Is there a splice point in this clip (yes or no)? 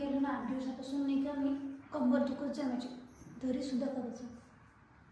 no